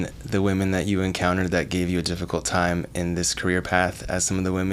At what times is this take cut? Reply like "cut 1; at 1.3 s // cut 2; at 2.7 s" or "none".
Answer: none